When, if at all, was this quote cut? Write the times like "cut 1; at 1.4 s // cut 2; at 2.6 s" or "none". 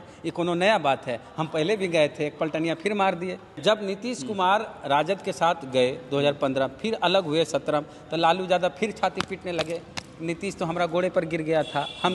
cut 1; at 3.6 s